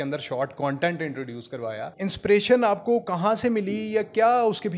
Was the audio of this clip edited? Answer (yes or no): yes